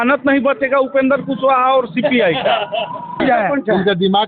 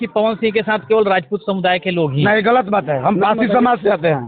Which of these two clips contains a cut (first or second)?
first